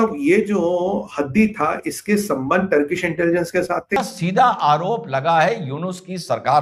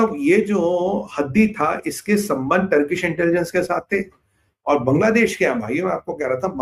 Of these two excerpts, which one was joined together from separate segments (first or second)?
first